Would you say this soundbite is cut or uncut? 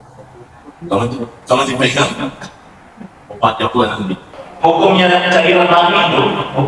cut